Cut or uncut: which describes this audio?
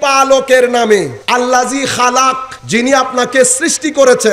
cut